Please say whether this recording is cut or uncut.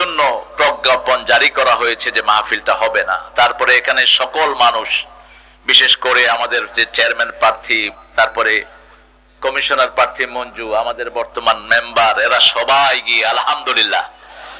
uncut